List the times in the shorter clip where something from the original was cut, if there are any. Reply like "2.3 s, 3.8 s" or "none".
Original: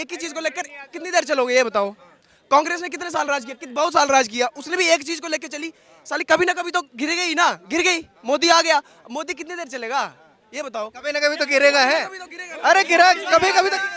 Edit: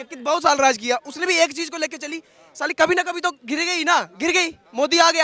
none